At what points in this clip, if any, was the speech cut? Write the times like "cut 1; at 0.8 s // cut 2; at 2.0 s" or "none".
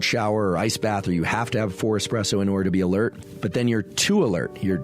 cut 1; at 3.3 s